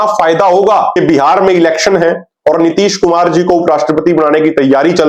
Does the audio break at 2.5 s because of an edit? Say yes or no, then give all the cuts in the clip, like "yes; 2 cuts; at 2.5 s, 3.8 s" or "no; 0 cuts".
no; 1 cut; at 1.0 s